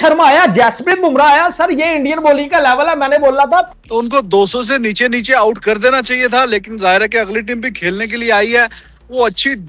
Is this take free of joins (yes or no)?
no